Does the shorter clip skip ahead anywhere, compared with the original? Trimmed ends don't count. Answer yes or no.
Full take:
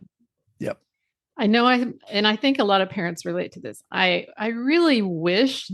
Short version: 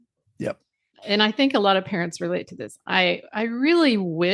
yes